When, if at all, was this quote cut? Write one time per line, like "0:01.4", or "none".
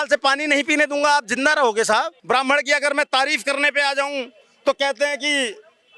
0:02.2